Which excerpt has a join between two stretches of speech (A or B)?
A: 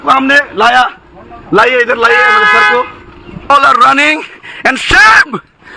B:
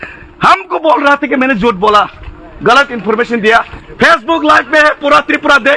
A